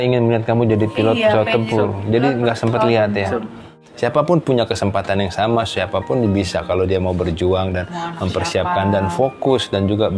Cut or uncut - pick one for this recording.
cut